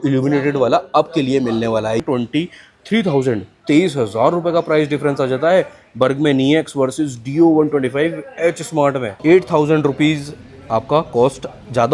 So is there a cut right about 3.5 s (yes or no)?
no